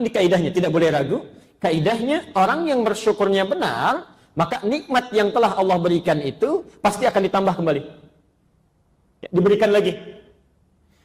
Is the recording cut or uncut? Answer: uncut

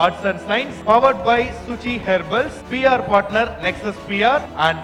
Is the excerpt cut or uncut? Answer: uncut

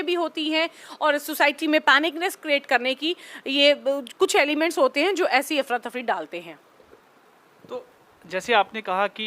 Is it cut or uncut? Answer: uncut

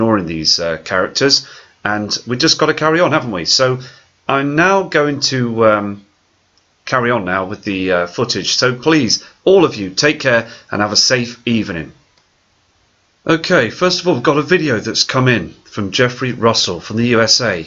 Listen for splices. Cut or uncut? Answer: cut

